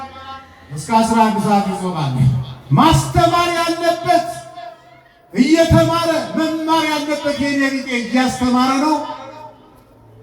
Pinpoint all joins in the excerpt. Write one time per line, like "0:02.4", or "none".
0:02.5